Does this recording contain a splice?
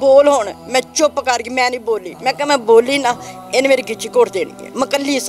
yes; 1 cut; at 2.1 s

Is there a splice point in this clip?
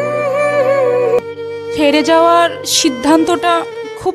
yes; 1 cut; at 1.2 s

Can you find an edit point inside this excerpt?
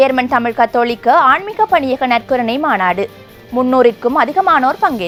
no; 0 cuts

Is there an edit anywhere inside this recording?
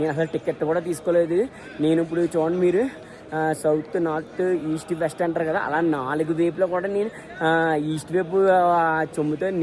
no; 0 cuts

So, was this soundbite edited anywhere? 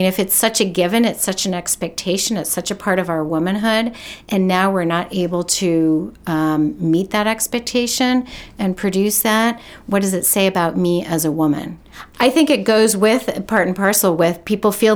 no; 0 cuts

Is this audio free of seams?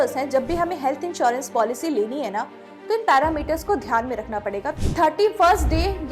no; 1 cut; at 4.8 s

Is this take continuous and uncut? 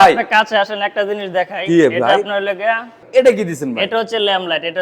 no; 1 cut; at 2.9 s

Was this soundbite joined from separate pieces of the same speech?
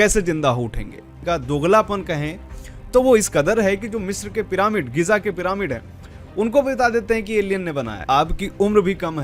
yes; 2 cuts; at 1.2 s, 8.0 s

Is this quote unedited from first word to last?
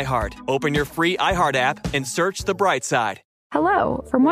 no; 1 cut; at 3.3 s

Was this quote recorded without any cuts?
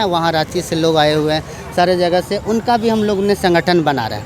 yes; 0 cuts

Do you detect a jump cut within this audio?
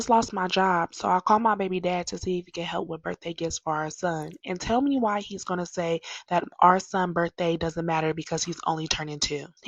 no; 0 cuts

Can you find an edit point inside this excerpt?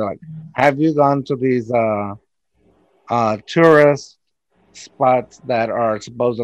no; 0 cuts

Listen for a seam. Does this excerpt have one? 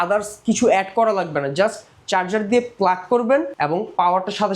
no; 0 cuts

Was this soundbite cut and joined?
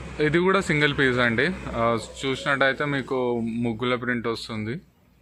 no; 0 cuts

